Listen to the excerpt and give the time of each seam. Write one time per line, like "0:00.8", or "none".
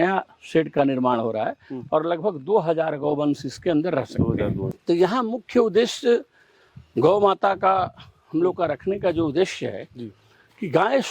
0:04.7